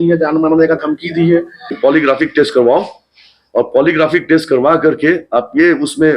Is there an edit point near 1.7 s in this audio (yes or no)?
yes